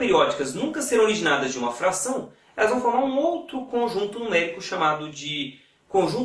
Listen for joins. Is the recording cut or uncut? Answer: uncut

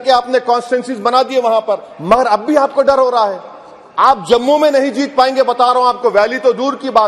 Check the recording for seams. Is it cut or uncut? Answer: uncut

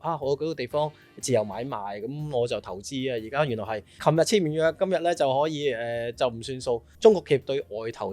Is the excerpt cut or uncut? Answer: cut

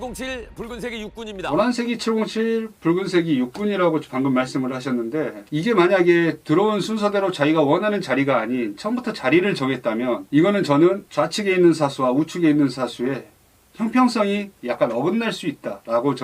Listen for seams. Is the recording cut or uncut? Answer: cut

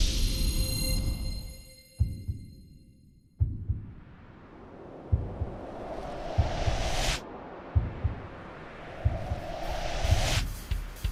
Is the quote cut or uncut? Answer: uncut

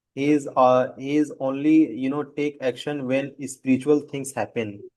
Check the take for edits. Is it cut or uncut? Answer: uncut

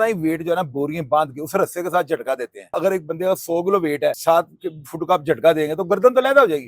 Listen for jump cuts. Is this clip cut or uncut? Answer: cut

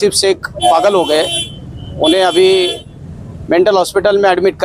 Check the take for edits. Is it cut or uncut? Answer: uncut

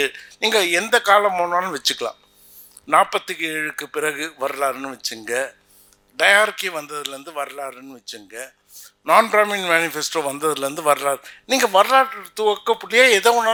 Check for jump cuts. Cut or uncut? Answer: uncut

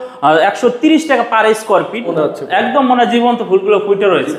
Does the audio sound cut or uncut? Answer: cut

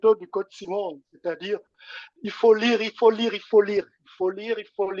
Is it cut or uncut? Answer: uncut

